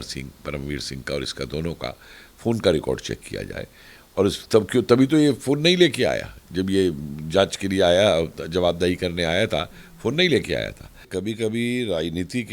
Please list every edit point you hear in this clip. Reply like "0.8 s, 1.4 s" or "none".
11.1 s